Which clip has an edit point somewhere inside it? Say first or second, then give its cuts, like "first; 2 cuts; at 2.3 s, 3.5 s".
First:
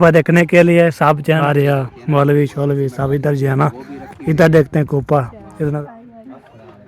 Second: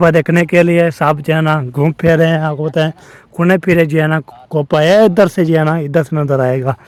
first; 2 cuts; at 1.4 s, 5.8 s